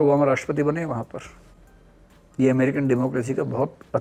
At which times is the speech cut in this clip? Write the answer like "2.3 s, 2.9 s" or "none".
none